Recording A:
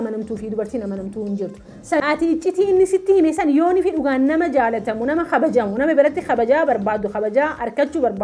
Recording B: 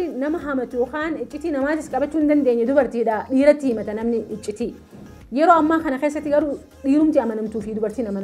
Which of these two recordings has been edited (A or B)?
A